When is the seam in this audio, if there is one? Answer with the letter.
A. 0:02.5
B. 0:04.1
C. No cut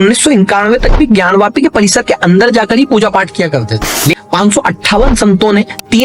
B